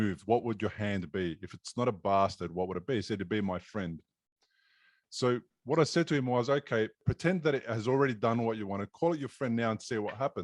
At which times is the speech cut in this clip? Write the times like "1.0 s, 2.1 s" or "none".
7.1 s